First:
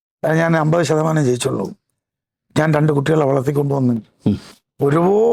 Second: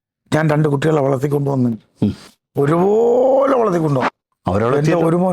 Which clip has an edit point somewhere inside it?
second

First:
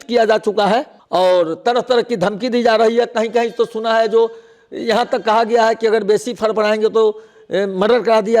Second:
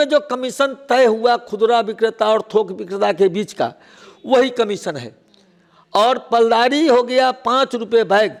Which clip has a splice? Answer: first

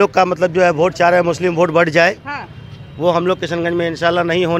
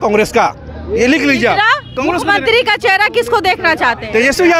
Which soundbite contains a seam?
second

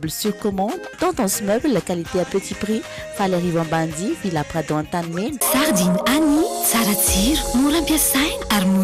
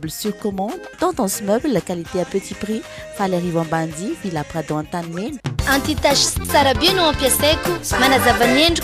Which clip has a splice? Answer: first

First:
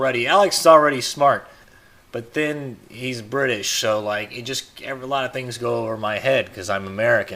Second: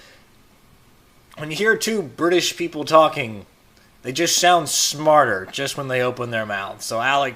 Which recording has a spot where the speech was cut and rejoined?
second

